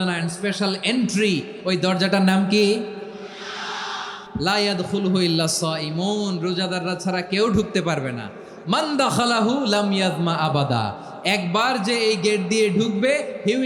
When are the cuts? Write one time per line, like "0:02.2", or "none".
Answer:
0:04.2